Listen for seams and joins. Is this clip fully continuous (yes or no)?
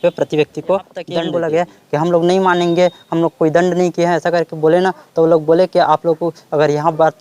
no